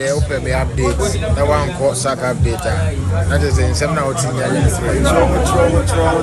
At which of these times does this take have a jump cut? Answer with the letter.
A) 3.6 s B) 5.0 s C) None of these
C